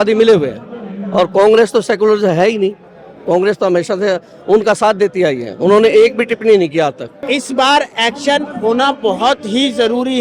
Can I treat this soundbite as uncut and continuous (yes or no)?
no